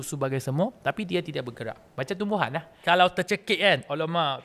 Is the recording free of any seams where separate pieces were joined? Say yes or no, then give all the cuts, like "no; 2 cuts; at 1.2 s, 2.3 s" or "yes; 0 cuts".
no; 1 cut; at 2.8 s